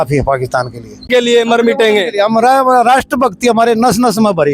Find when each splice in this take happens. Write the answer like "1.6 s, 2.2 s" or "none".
1.1 s